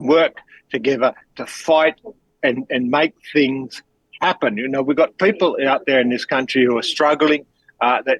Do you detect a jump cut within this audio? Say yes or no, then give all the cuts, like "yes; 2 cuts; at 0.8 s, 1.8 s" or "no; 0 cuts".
no; 0 cuts